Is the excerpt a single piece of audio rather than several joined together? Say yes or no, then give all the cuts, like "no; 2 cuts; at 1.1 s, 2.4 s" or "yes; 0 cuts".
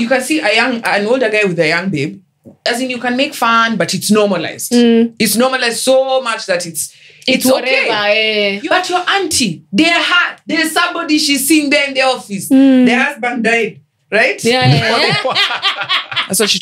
no; 1 cut; at 8.6 s